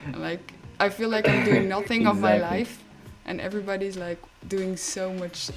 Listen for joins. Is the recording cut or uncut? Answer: uncut